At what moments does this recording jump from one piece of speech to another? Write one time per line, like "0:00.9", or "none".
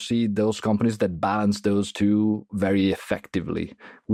none